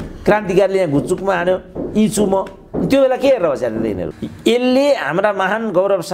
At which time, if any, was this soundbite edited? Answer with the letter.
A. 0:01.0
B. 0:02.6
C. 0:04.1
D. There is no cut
C